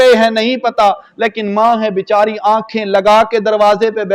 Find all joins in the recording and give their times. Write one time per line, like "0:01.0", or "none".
none